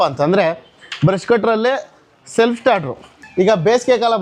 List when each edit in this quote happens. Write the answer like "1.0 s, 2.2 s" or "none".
3.2 s